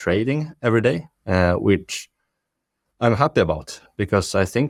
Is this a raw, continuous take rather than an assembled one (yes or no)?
yes